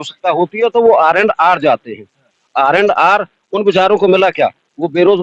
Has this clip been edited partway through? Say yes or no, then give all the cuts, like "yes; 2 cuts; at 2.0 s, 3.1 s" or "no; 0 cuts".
no; 0 cuts